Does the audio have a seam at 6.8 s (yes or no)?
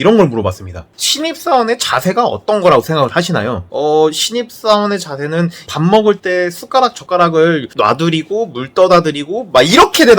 yes